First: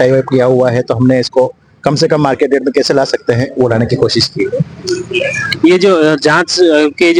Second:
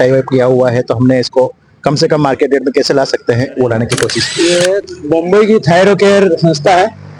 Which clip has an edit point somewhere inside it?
second; 1 cut; at 4.2 s

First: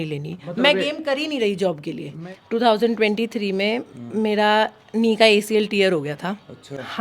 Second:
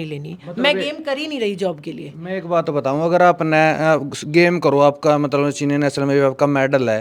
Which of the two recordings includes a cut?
first; 1 cut; at 2.2 s

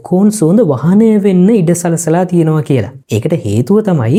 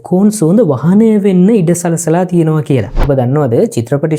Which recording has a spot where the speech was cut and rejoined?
second; 1 cut; at 3.1 s

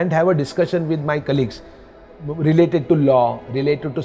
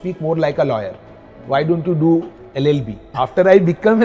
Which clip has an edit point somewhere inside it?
second; 1 cut; at 3.0 s

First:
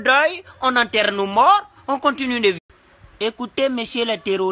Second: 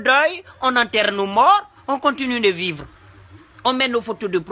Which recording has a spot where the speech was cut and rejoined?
second; 1 cut; at 2.7 s

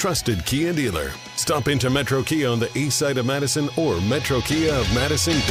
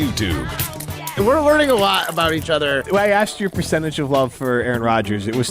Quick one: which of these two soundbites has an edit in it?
second; 1 cut; at 1.0 s

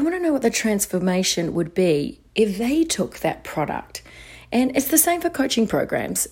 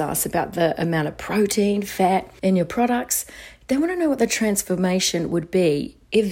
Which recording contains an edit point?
second; 1 cut; at 2.3 s

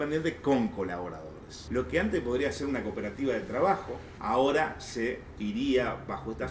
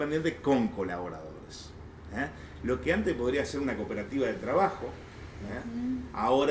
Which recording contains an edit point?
first; 2 cuts; at 1.5 s, 4.1 s

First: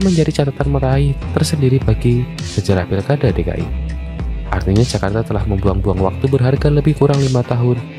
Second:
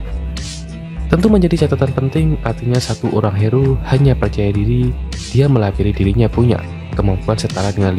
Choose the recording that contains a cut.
second; 1 cut; at 1.1 s

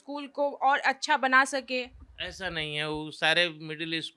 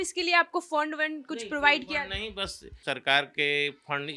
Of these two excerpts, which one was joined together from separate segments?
second; 1 cut; at 2.8 s

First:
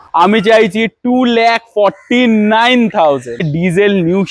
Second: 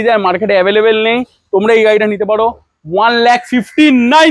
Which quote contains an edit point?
first; 1 cut; at 3.4 s

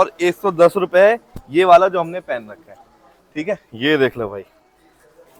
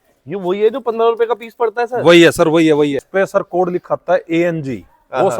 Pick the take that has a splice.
second; 1 cut; at 3.1 s

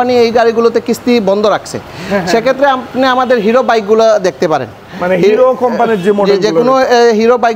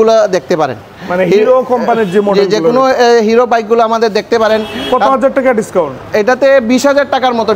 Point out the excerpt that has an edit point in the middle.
second; 1 cut; at 4.7 s

